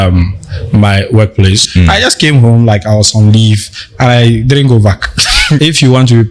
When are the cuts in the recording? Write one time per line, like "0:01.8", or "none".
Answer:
0:01.6
0:05.6

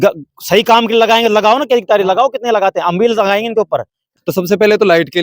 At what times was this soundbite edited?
0:04.1

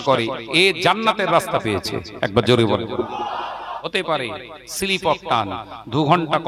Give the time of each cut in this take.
0:03.7

